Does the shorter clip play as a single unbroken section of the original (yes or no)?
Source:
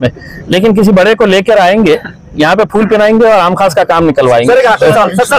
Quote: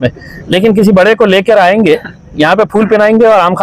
yes